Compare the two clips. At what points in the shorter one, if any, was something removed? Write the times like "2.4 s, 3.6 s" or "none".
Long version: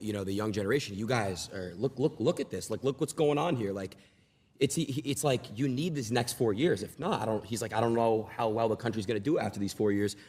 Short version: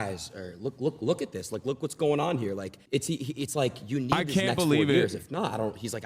2.7 s

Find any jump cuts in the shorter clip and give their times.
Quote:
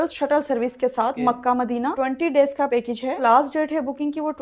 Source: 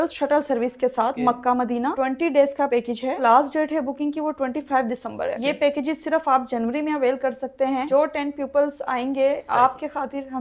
none

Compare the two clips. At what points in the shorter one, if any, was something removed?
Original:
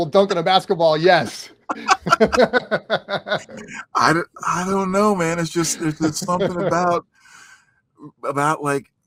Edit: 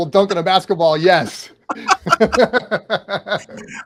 none

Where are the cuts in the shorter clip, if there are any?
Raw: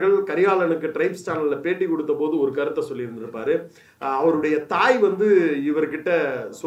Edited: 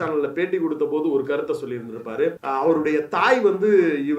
2.4 s

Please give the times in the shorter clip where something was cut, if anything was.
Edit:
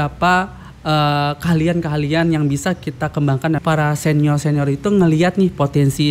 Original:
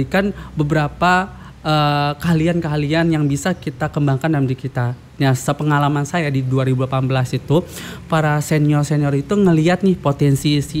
3.6 s

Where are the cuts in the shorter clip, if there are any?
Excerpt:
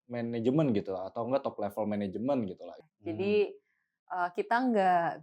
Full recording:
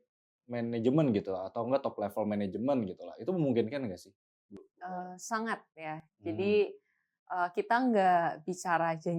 2.7 s

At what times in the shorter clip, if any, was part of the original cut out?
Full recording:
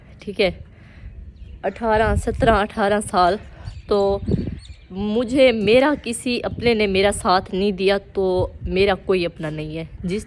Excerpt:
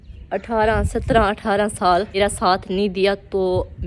2.1 s

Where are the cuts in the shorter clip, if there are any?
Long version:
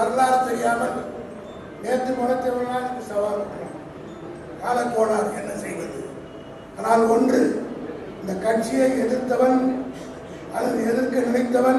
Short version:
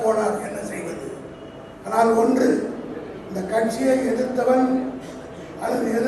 none

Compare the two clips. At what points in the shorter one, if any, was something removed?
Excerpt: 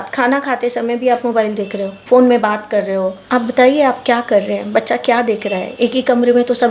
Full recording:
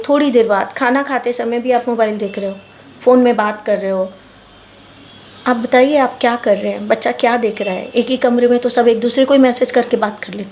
1.9 s, 3.2 s

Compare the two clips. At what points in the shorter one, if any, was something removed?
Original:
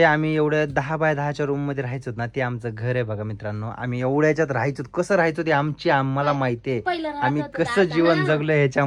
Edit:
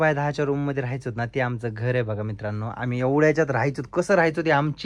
none

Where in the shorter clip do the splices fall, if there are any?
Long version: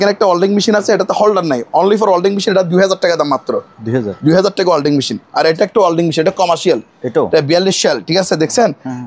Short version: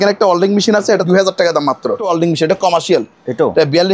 1.0 s, 2.1 s

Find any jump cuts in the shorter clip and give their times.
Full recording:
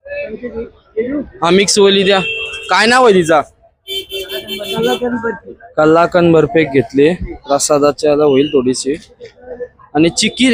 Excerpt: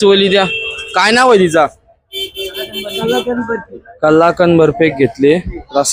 none

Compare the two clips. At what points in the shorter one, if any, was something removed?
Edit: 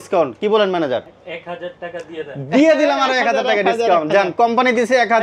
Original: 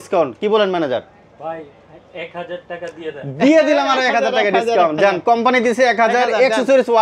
1.2 s

